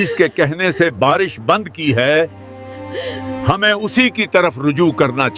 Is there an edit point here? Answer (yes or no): no